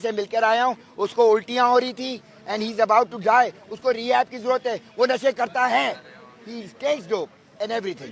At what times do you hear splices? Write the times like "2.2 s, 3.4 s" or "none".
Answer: none